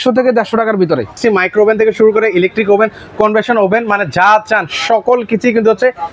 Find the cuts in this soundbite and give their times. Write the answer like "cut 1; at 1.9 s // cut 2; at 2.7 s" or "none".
cut 1; at 1.2 s